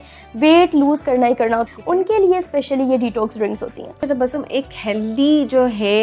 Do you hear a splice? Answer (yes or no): yes